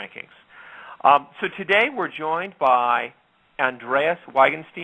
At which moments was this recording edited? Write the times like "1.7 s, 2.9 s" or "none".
none